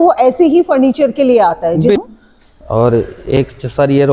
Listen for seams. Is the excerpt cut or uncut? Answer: cut